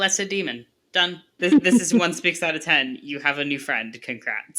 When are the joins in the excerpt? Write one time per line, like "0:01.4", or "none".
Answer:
0:01.4